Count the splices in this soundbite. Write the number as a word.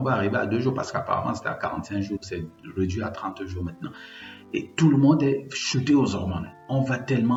zero